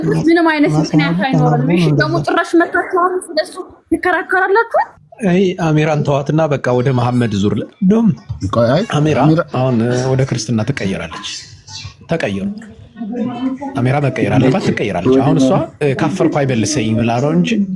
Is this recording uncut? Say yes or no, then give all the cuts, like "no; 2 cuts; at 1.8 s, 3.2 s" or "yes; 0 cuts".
no; 1 cut; at 5.0 s